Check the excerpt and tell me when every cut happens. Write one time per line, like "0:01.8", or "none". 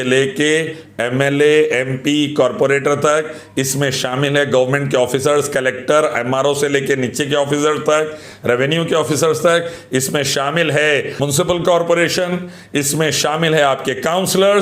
0:11.2